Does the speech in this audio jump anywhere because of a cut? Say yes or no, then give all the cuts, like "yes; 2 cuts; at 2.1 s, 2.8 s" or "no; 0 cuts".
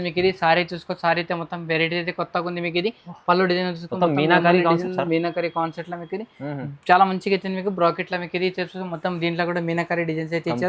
no; 0 cuts